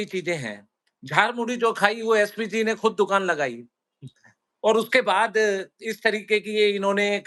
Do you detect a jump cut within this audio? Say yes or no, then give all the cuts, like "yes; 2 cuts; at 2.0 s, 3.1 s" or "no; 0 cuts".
no; 0 cuts